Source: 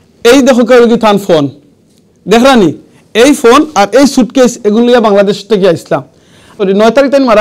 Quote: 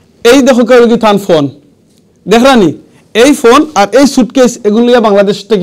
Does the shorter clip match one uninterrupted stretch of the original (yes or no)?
yes